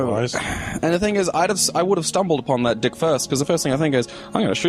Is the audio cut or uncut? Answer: cut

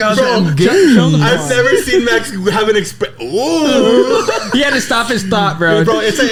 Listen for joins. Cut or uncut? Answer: uncut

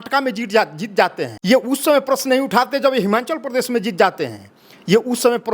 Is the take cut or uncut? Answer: cut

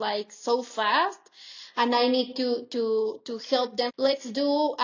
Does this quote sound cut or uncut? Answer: cut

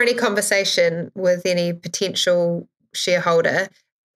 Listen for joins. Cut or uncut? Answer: uncut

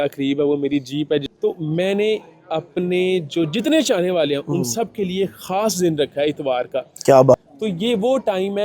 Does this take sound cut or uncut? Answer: cut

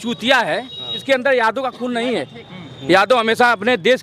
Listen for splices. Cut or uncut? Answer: cut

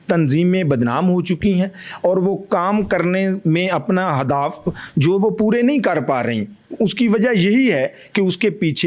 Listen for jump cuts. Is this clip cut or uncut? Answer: uncut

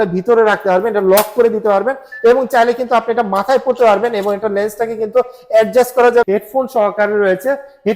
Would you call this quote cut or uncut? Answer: cut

